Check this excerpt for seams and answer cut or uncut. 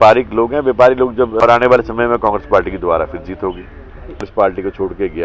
cut